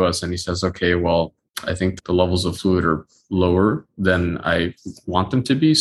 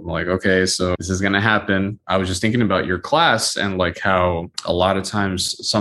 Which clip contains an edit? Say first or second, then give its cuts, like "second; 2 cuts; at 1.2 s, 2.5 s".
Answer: second; 3 cuts; at 1.0 s, 2.0 s, 4.5 s